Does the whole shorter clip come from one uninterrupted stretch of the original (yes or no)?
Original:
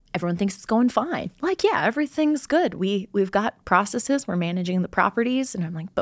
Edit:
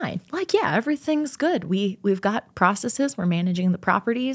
yes